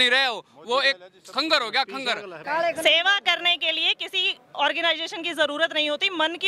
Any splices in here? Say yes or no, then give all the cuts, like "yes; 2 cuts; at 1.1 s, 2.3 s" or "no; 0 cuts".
yes; 1 cut; at 2.4 s